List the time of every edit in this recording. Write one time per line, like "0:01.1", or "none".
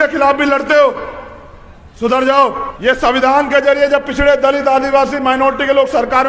0:02.7